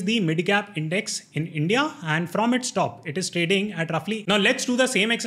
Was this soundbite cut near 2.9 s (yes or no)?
no